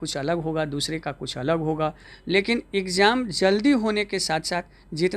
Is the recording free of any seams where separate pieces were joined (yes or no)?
no